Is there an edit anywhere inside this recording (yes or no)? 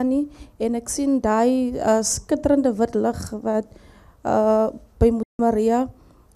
no